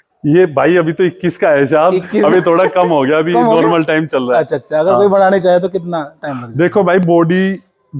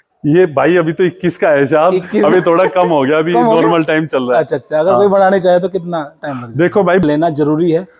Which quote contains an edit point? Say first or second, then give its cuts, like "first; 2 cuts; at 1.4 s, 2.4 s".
second; 1 cut; at 7.0 s